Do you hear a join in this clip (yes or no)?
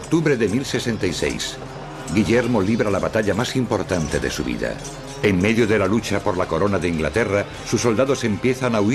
no